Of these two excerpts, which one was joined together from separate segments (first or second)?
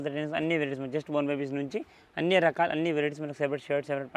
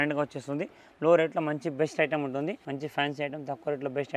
second